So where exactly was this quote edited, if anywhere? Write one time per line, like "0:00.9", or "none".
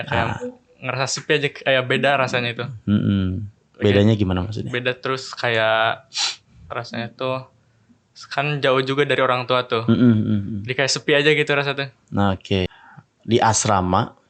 0:12.7